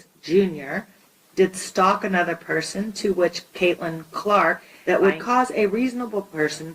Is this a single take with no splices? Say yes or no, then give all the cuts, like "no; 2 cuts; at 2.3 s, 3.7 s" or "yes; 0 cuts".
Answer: no; 1 cut; at 4.7 s